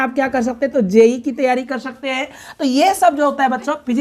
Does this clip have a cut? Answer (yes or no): no